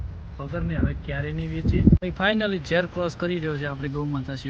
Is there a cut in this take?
yes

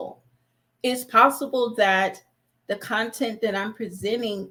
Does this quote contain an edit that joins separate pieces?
no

